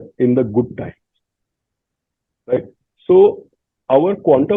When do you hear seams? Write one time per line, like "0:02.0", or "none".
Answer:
none

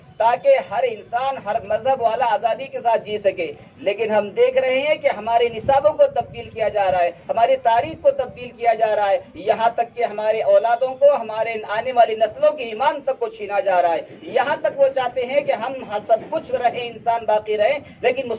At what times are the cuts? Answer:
none

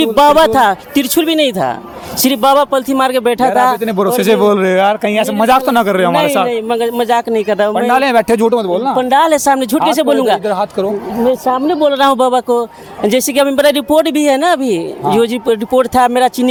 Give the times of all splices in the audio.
none

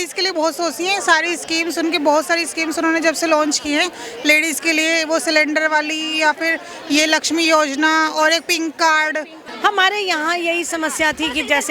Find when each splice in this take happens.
0:09.4

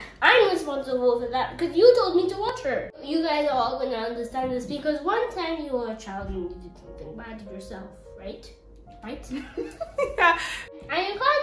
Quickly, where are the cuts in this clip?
0:03.0
0:10.7

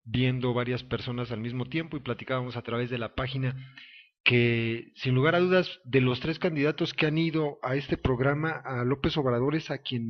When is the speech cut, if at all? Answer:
0:03.3

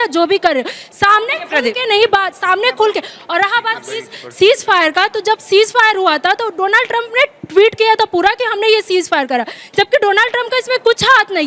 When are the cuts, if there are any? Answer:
none

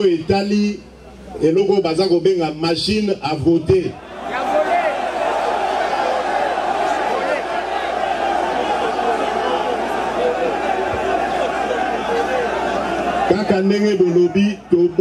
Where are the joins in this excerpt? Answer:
none

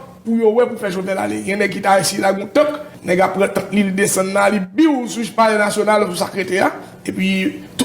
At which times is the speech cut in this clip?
0:02.9

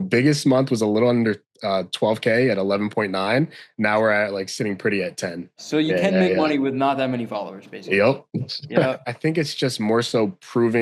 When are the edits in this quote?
0:05.6
0:09.0

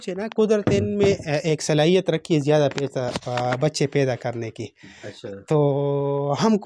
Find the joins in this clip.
none

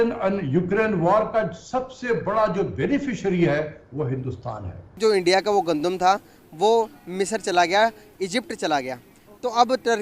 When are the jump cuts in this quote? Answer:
0:04.9

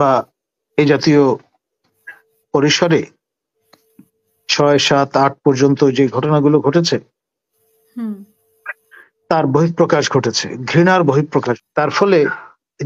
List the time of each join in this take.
0:11.6

